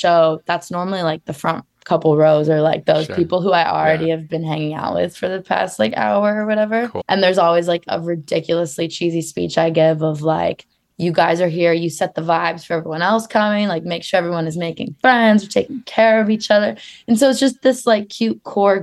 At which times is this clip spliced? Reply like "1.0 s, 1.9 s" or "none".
7.0 s